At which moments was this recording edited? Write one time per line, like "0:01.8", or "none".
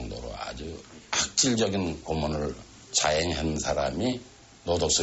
0:03.0
0:03.0
0:04.1